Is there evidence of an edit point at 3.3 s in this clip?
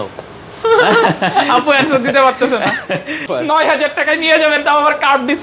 yes; 1 cut; at 3.3 s

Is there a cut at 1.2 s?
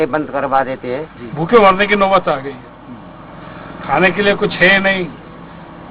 yes; 1 cut; at 1.2 s

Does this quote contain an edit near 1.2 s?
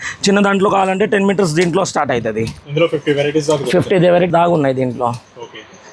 no; 2 cuts; at 2.6 s, 4.3 s

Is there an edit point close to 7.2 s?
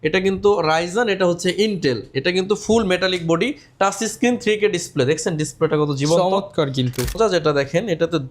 yes; 1 cut; at 7.2 s

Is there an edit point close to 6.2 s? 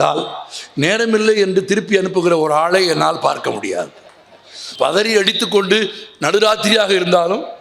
no; 1 cut; at 4.6 s

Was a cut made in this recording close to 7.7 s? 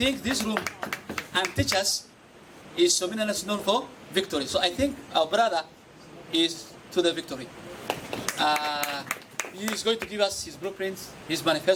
no; 0 cuts

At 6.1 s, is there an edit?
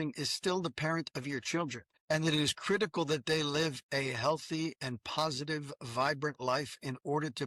no; 1 cut; at 1.9 s

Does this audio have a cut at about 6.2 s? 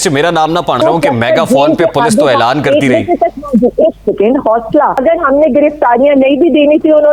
no; 2 cuts; at 0.8 s, 5.0 s

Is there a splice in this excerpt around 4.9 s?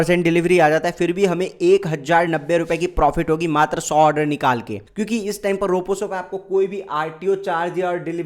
yes; 1 cut; at 4.9 s

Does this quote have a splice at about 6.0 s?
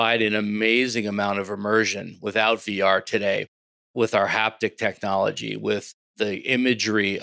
yes; 1 cut; at 6.0 s

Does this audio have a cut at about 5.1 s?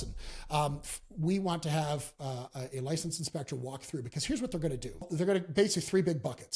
yes; 1 cut; at 5.1 s

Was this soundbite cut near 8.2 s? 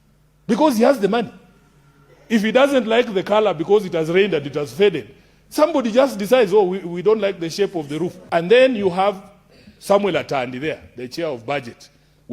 yes; 1 cut; at 8.2 s

